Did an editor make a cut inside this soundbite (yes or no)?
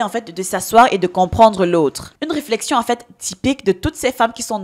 yes